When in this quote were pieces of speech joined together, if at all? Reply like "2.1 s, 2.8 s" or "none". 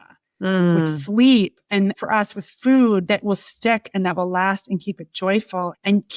1.7 s, 3.0 s